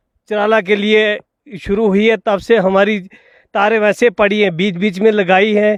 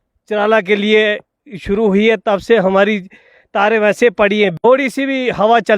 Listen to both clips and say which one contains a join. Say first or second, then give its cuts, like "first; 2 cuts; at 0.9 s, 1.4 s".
second; 1 cut; at 4.5 s